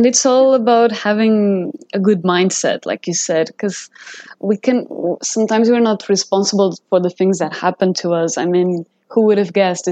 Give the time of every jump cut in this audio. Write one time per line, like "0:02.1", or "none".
none